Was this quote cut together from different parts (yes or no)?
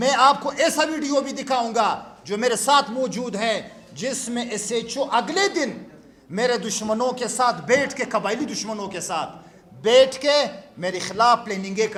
no